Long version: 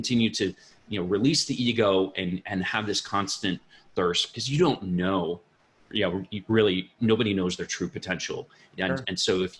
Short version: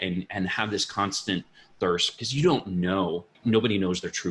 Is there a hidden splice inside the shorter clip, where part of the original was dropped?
yes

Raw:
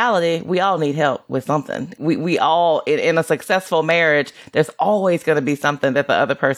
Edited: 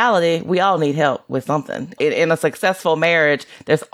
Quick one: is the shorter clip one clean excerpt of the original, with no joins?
no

